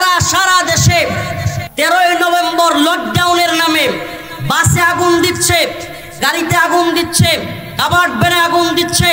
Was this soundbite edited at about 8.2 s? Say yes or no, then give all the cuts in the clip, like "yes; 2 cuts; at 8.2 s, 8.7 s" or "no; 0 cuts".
no; 1 cut; at 1.6 s